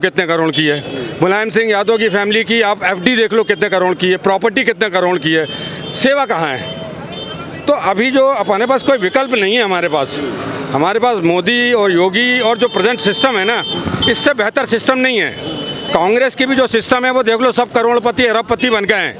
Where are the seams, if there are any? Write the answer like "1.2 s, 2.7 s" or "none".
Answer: none